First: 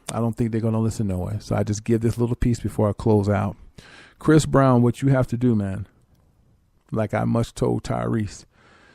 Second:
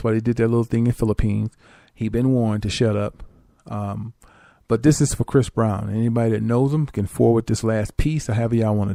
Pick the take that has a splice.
first; 1 cut; at 3.0 s

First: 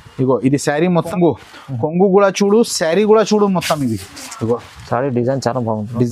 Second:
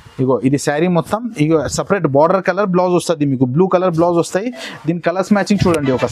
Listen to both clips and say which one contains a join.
first; 1 cut; at 1.1 s

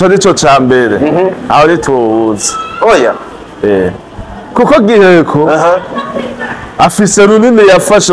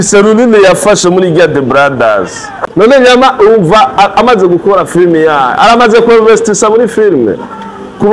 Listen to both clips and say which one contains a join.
second; 1 cut; at 2.4 s

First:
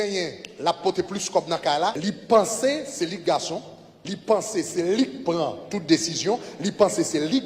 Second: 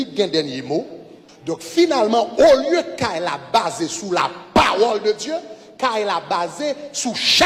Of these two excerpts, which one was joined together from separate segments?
first; 1 cut; at 2.0 s

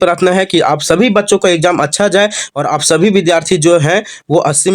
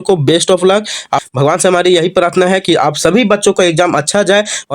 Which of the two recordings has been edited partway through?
second; 1 cut; at 1.2 s

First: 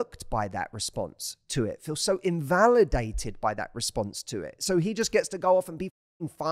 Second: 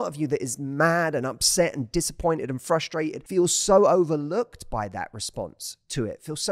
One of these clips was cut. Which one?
second; 1 cut; at 3.2 s

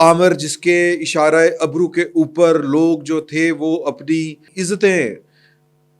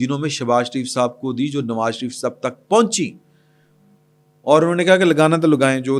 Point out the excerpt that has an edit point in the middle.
first; 1 cut; at 4.5 s

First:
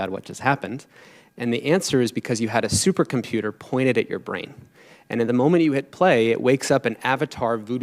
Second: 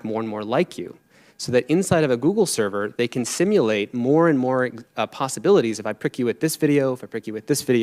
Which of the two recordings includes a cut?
first; 1 cut; at 4.8 s

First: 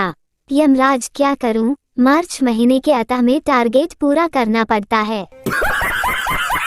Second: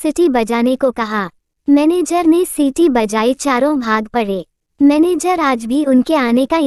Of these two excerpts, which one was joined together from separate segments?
first; 1 cut; at 5.6 s

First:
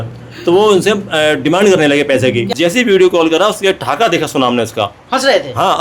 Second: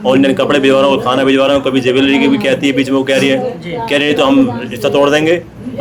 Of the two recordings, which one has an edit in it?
first; 1 cut; at 2.5 s

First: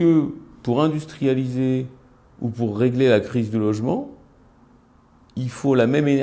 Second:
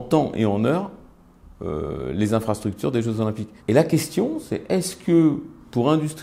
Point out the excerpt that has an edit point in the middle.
second; 1 cut; at 3.5 s

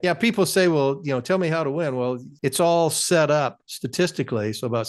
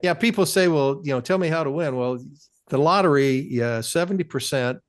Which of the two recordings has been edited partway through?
first; 1 cut; at 2.3 s

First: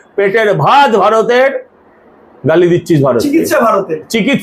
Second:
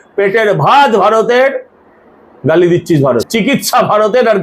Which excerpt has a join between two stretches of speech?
second; 1 cut; at 3.2 s

